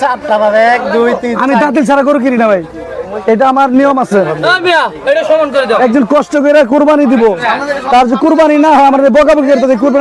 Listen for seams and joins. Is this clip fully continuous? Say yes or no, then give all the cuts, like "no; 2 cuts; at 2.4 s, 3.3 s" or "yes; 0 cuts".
yes; 0 cuts